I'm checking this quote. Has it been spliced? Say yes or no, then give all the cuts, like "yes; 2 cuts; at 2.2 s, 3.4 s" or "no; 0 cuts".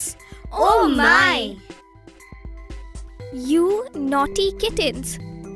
yes; 2 cuts; at 1.9 s, 3.3 s